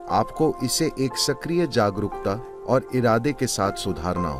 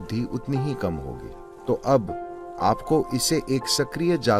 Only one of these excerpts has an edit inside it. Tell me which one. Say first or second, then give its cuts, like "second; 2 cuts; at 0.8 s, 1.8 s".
second; 1 cut; at 1.5 s